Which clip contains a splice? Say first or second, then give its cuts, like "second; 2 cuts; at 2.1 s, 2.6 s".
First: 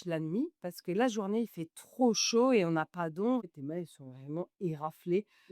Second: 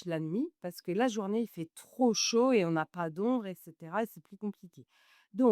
first; 1 cut; at 3.4 s